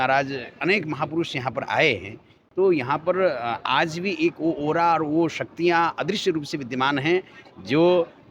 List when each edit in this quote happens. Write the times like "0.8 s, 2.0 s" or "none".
none

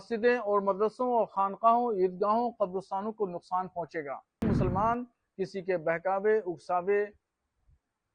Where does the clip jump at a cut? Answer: 4.4 s

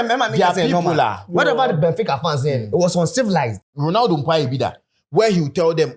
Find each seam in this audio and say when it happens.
3.6 s

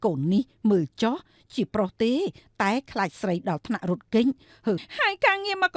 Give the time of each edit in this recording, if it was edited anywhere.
4.9 s

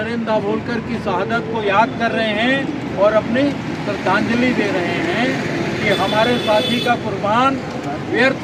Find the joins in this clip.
none

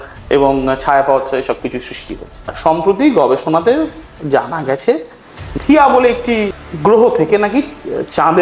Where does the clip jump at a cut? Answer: 2.5 s, 5.6 s, 6.6 s

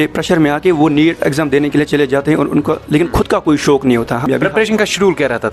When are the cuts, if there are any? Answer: 4.2 s

